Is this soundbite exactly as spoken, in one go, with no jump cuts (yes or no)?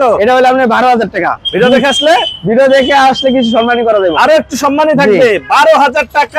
yes